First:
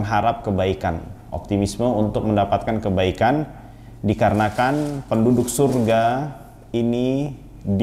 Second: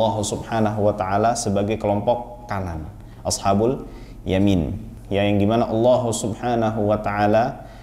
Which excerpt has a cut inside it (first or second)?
second